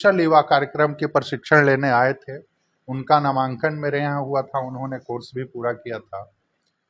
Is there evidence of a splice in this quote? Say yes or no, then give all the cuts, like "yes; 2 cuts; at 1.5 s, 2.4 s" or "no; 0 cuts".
no; 0 cuts